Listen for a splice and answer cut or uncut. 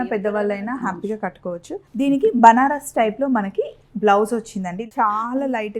uncut